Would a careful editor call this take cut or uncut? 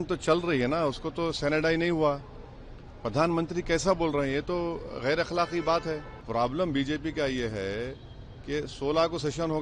cut